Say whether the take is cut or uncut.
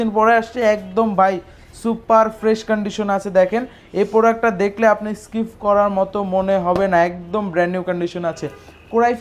uncut